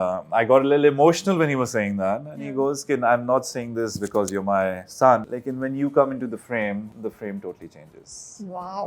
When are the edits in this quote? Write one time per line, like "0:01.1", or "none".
0:05.4
0:06.9